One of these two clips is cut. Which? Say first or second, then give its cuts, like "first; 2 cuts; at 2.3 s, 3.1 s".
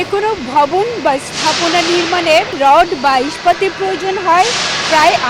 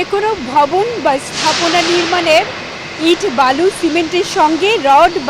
first; 1 cut; at 2.6 s